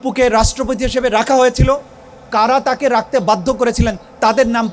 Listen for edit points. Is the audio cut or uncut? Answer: uncut